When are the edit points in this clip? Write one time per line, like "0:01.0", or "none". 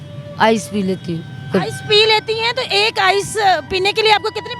none

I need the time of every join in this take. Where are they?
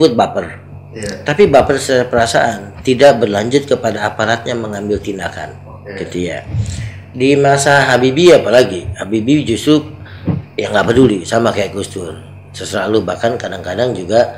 none

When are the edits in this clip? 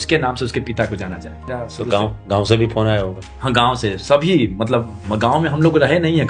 0:01.5

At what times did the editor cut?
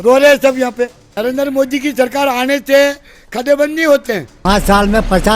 0:01.0
0:04.3

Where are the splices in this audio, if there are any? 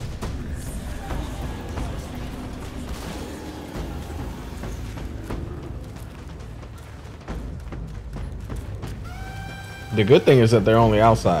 none

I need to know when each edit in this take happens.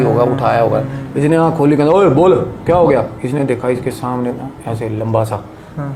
none

